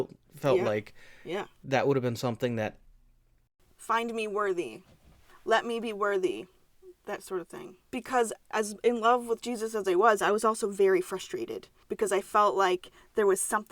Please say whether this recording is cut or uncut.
cut